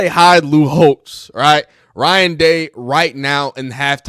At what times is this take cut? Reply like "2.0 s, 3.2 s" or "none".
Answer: none